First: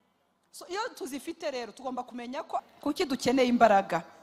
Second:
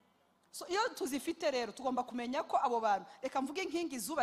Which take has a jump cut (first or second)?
first